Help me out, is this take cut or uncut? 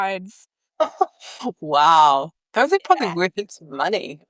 uncut